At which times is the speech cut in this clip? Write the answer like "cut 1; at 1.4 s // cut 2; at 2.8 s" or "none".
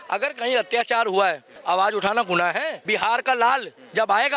cut 1; at 1.5 s // cut 2; at 2.8 s